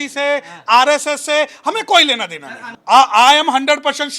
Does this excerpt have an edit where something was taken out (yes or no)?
yes